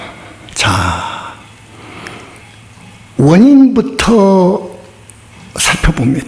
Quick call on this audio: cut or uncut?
cut